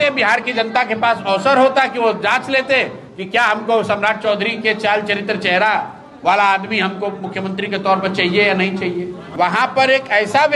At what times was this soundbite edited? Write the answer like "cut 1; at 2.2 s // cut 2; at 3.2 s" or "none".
cut 1; at 9.2 s